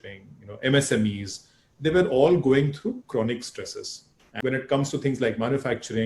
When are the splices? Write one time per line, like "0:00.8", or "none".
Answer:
0:04.2